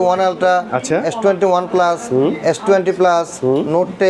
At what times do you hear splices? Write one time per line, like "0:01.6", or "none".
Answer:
none